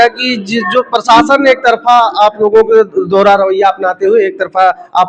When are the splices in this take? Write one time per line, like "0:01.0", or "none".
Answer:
none